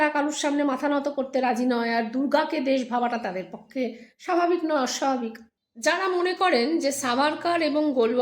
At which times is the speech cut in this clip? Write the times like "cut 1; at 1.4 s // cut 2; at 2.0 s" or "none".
cut 1; at 5.5 s

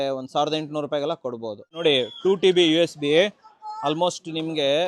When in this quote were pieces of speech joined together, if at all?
cut 1; at 1.8 s

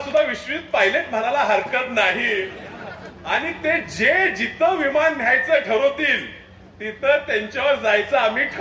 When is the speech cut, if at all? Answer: none

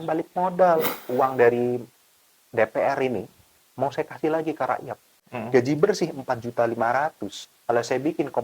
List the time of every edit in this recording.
cut 1; at 1.0 s // cut 2; at 5.3 s

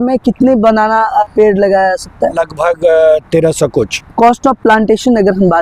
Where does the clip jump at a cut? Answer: cut 1; at 1.2 s // cut 2; at 2.3 s // cut 3; at 4.0 s

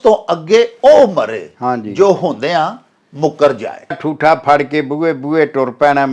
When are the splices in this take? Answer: cut 1; at 4.0 s

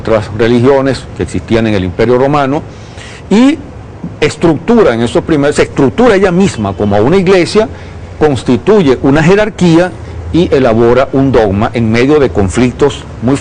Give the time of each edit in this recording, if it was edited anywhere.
cut 1; at 9.3 s

